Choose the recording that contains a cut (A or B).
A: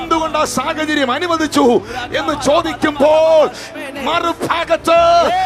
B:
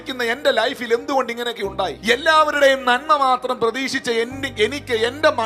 B